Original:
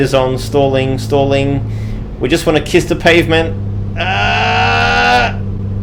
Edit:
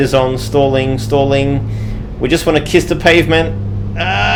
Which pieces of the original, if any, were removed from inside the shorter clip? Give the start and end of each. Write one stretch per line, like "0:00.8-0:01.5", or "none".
none